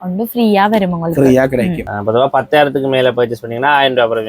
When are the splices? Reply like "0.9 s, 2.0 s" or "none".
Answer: 1.8 s